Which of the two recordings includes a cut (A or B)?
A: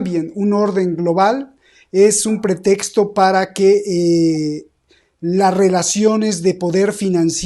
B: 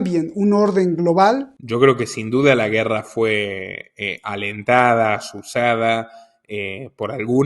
B